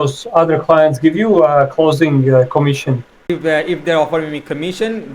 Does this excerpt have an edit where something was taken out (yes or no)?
yes